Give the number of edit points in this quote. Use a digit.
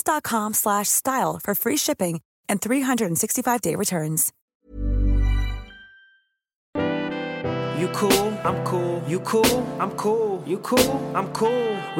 2